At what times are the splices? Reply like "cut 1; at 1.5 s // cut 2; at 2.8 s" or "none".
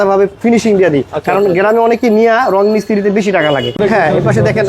cut 1; at 3.8 s